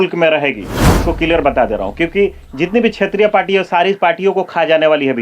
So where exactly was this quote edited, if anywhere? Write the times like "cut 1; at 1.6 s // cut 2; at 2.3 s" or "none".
cut 1; at 1.0 s